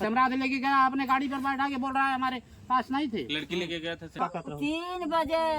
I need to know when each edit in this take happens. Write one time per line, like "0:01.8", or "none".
0:04.1